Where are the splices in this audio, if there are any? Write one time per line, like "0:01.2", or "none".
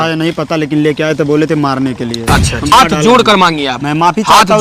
0:02.7